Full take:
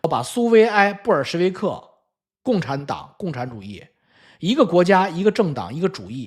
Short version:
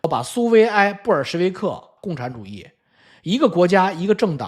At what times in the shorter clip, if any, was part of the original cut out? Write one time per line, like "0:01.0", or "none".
0:01.9